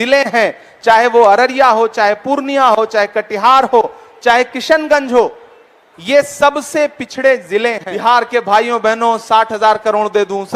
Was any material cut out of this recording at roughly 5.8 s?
no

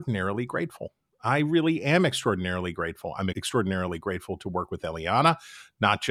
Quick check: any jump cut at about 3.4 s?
yes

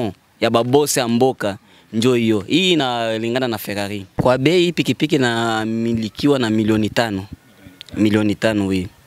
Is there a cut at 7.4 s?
no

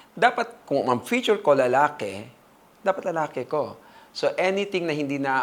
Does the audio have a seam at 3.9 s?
no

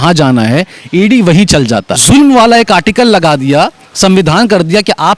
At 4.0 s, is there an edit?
no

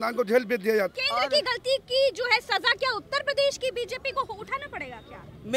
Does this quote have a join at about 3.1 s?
no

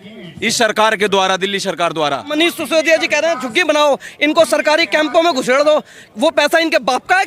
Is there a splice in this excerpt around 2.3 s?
yes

